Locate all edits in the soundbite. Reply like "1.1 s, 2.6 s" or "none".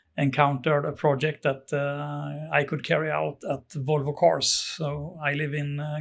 none